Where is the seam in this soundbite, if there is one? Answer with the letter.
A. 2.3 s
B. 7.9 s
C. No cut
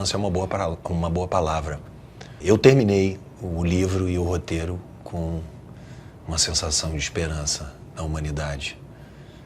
A